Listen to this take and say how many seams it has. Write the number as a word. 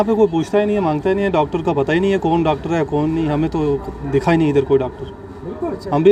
zero